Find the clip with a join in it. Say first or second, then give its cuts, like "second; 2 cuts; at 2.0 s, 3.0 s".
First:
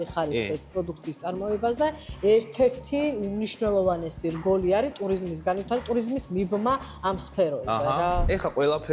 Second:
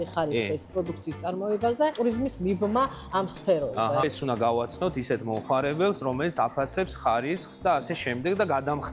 second; 3 cuts; at 1.9 s, 4.0 s, 6.0 s